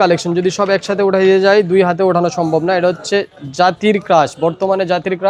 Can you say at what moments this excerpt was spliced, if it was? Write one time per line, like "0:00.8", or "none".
none